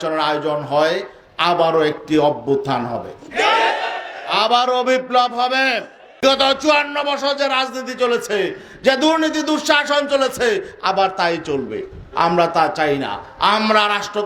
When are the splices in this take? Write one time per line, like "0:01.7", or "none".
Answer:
0:06.2